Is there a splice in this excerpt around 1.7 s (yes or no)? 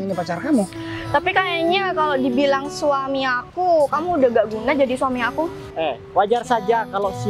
no